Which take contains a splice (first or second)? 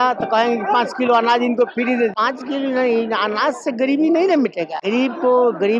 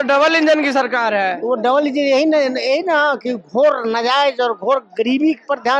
first